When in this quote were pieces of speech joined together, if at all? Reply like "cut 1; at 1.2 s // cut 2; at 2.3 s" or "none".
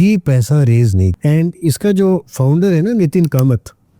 cut 1; at 1.1 s